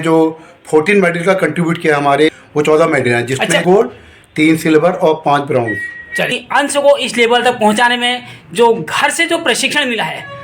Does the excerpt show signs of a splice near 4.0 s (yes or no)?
no